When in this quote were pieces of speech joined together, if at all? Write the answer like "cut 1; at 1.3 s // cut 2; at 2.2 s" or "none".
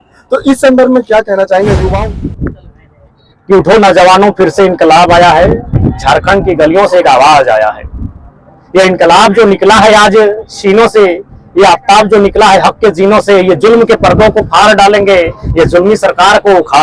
cut 1; at 1.9 s